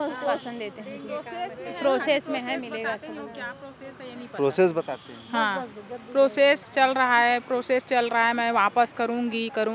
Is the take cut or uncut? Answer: uncut